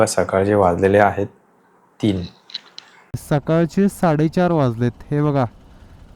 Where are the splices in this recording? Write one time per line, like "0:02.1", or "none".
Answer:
0:03.2